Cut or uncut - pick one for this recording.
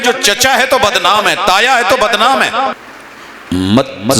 cut